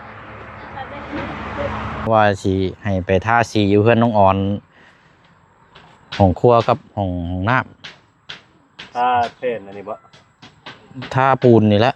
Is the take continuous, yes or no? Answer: no